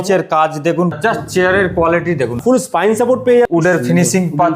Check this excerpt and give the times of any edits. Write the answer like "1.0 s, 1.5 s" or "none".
1.0 s, 2.4 s, 3.5 s